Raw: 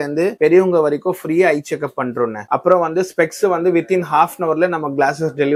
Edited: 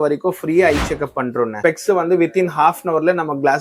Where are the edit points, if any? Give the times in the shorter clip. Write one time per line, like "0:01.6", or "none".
0:01.6